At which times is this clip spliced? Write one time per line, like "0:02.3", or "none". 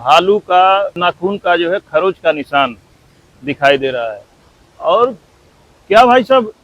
0:01.0